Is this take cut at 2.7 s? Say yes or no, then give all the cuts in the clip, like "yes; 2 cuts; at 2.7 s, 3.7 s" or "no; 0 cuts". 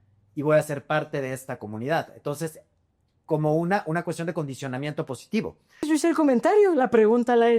no; 1 cut; at 5.8 s